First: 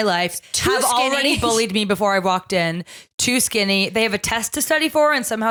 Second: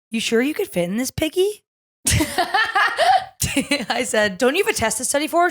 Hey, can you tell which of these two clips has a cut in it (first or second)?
second